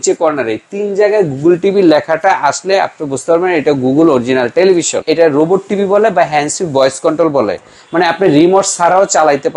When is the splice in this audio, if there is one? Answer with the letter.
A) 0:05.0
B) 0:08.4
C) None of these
A